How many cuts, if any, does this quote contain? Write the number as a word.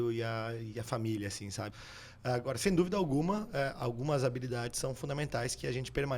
one